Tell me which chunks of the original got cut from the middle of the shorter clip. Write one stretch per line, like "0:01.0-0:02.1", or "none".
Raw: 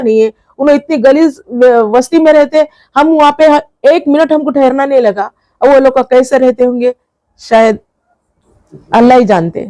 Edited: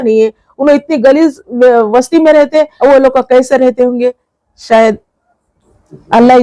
0:02.7-0:05.5